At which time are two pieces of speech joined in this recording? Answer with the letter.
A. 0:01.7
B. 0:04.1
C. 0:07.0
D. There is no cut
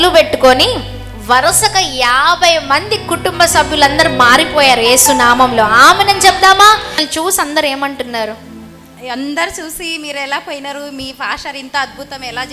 C